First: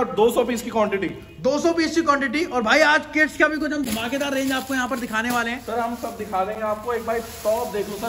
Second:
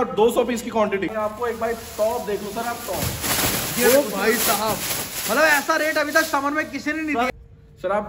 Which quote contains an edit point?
second; 2 cuts; at 1.1 s, 7.3 s

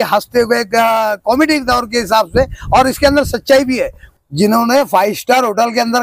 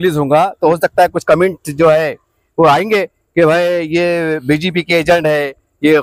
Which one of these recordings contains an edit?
first; 1 cut; at 4.0 s

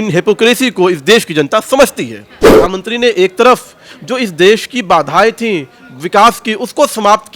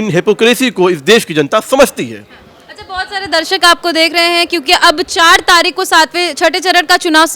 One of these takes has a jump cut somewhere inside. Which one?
first; 1 cut; at 2.5 s

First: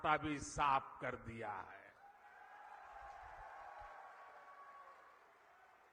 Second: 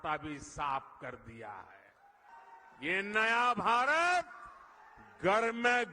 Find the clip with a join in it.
second; 1 cut; at 2.3 s

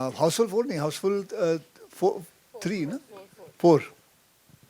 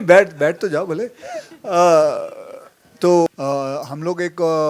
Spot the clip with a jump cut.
second; 1 cut; at 3.3 s

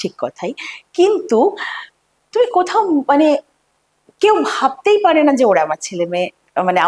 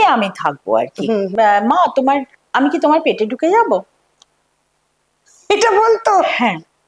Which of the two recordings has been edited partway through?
second; 1 cut; at 1.3 s

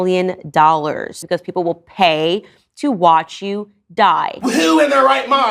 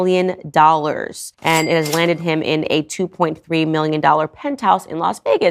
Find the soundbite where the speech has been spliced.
first; 2 cuts; at 1.2 s, 4.3 s

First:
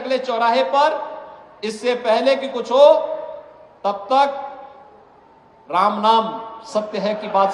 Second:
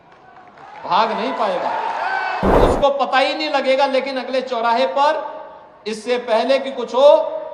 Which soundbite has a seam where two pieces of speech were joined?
second; 1 cut; at 2.6 s

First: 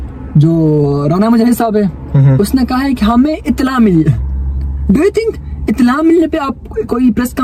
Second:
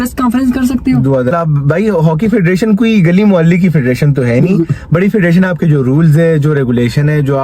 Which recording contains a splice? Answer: second; 1 cut; at 1.3 s

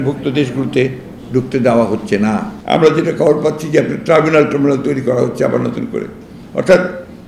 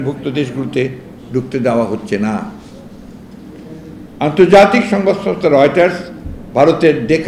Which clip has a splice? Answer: first; 1 cut; at 2.5 s

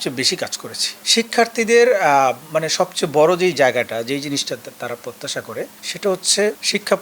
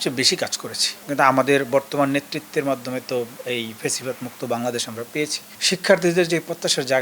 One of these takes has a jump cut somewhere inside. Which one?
second; 2 cuts; at 1.0 s, 5.6 s

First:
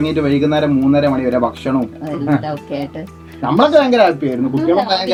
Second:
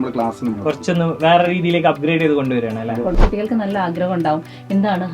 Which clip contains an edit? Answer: second; 1 cut; at 3.2 s

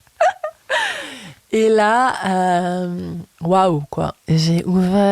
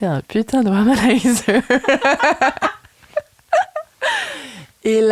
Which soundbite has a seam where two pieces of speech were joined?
first; 1 cut; at 4.2 s

